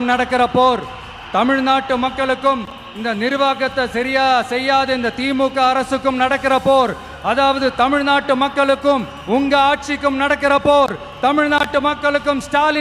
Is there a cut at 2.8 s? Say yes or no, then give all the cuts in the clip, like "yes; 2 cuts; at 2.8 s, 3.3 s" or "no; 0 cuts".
no; 0 cuts